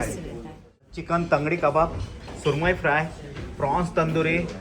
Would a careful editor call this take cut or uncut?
cut